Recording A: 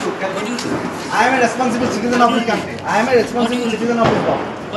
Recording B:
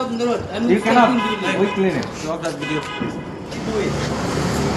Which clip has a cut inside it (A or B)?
B